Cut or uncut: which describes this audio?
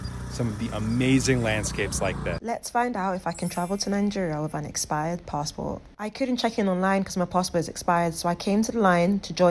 uncut